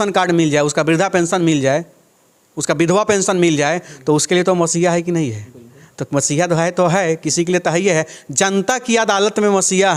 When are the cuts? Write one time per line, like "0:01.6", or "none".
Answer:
none

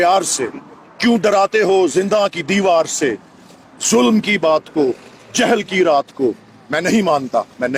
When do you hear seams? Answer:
none

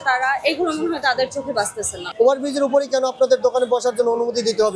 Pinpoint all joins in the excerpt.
0:02.0

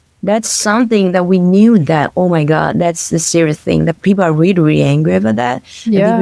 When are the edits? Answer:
none

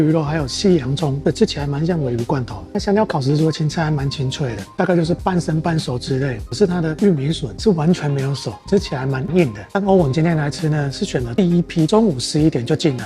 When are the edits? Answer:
0:02.7
0:04.8
0:06.4
0:09.6
0:11.9

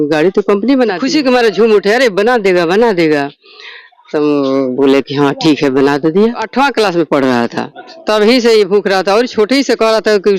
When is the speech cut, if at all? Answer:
0:01.0
0:06.4

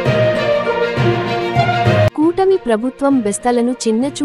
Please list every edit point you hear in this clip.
0:01.8

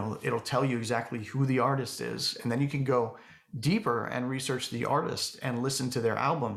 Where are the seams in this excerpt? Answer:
none

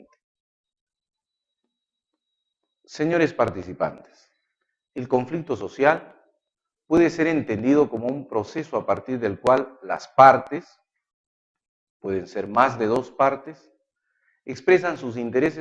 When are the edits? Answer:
0:13.1

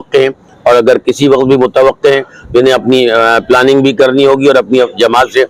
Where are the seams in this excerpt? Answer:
none

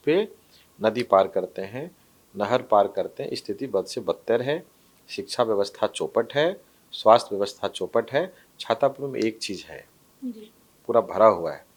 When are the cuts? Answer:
none

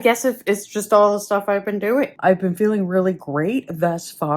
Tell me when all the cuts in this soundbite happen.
0:02.1

